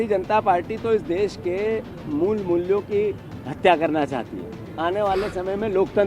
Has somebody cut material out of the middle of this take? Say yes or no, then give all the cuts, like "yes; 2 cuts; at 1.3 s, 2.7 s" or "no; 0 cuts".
no; 0 cuts